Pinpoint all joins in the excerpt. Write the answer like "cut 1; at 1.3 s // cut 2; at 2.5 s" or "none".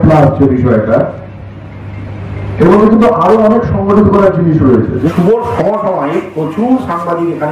cut 1; at 5.1 s